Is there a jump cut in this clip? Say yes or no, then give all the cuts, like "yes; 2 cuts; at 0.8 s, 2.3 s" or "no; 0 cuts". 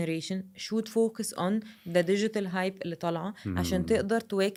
no; 0 cuts